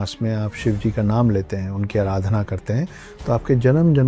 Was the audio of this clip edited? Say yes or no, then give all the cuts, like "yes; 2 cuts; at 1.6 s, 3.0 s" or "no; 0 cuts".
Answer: no; 0 cuts